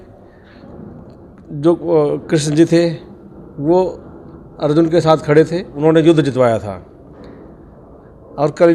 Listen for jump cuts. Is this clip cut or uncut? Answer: cut